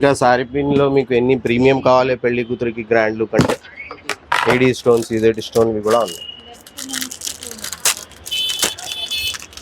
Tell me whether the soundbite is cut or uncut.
uncut